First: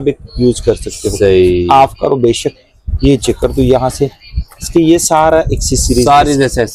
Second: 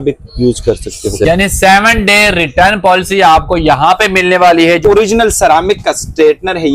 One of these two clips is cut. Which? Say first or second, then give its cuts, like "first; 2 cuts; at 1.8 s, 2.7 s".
second; 2 cuts; at 1.2 s, 4.8 s